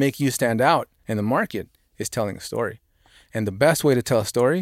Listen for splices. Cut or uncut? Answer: cut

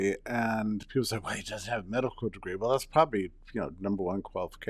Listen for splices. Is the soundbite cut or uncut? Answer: uncut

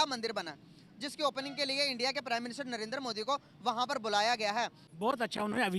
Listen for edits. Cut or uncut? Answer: cut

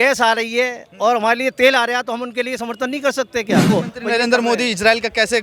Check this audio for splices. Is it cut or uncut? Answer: cut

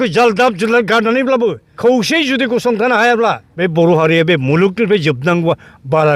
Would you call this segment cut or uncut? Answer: cut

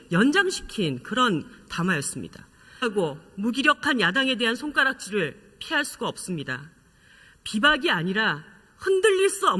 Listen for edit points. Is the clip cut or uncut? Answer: uncut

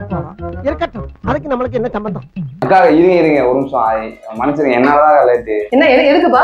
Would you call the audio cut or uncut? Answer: uncut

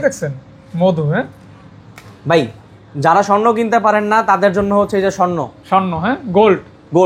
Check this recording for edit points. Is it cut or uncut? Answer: uncut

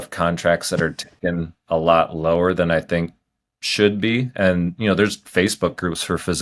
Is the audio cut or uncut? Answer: uncut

